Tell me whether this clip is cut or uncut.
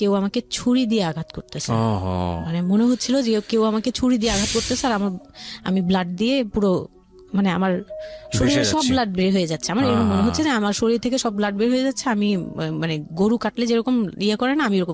uncut